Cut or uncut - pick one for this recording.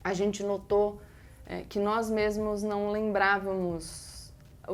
uncut